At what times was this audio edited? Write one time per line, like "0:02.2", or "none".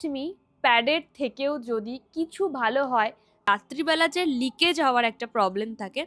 0:03.5